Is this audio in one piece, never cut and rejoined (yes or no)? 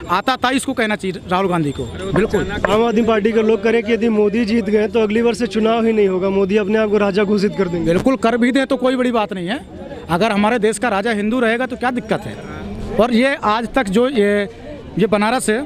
yes